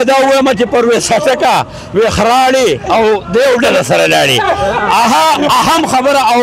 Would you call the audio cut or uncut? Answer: uncut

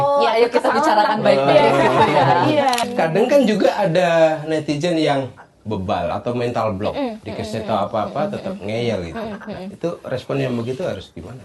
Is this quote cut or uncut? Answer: cut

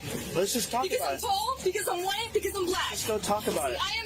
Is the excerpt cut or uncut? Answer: uncut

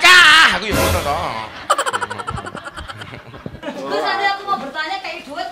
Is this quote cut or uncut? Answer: cut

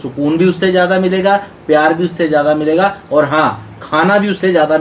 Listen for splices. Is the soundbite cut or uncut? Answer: uncut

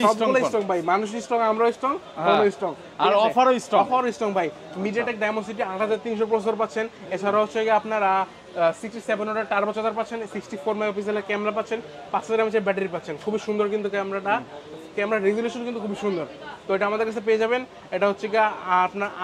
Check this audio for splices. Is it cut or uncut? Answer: uncut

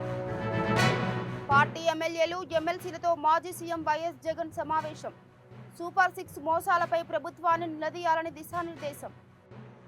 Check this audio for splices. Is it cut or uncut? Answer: uncut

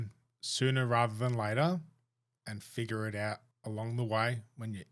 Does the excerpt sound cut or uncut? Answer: cut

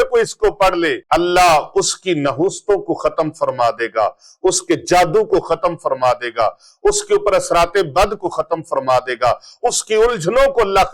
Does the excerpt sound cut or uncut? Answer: cut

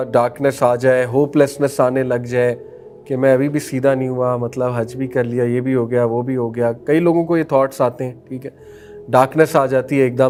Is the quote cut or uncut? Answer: uncut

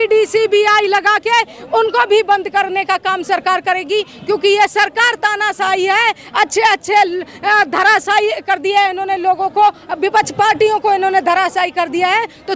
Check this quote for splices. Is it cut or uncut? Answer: uncut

